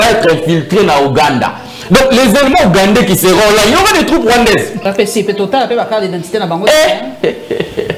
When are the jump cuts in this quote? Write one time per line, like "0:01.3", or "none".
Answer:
0:04.8